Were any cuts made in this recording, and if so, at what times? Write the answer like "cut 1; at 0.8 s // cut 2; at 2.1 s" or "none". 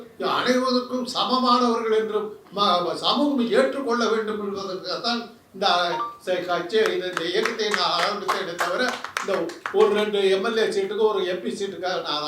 none